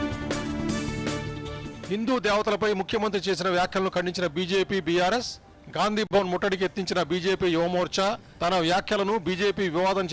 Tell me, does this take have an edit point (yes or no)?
yes